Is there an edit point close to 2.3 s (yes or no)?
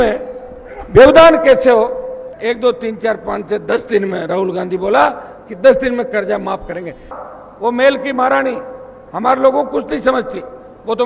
yes